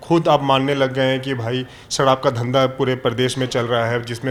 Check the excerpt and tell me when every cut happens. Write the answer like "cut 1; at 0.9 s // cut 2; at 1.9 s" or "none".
none